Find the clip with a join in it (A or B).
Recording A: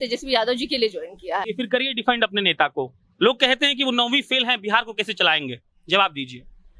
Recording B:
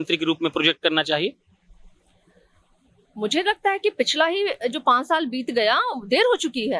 A